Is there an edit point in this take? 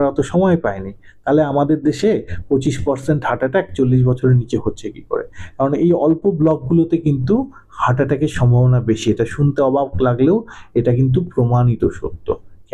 no; 0 cuts

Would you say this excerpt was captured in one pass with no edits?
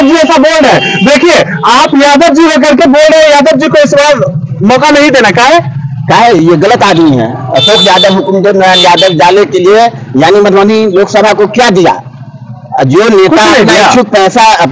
yes; 0 cuts

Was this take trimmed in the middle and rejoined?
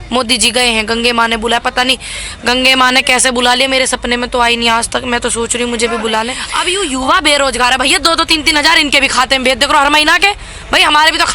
yes; 1 cut; at 6.5 s

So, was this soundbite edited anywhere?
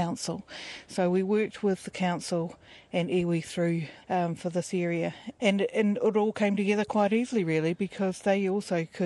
yes; 2 cuts; at 3.9 s, 5.2 s

